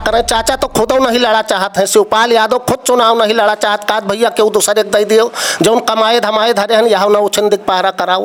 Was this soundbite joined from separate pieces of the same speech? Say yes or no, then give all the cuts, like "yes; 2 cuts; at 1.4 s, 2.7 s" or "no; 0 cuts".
no; 0 cuts